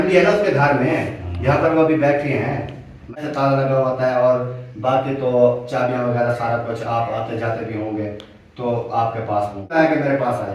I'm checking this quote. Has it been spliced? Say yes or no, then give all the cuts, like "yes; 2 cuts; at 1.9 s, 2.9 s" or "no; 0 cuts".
yes; 2 cuts; at 3.2 s, 9.7 s